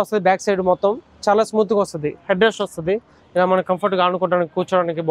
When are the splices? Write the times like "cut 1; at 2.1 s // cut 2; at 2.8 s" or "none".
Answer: none